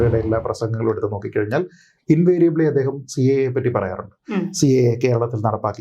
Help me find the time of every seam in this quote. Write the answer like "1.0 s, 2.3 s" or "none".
none